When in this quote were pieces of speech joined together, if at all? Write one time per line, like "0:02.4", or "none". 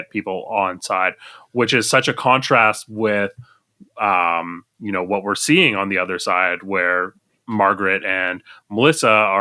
none